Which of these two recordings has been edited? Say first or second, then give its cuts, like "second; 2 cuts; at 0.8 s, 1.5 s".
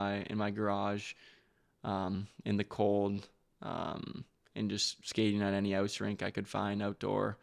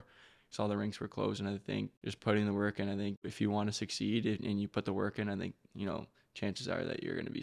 second; 2 cuts; at 2.0 s, 3.3 s